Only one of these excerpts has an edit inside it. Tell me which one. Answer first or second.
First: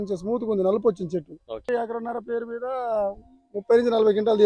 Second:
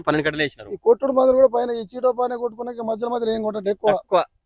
first